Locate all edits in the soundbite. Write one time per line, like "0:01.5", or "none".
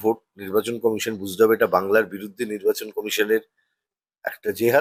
none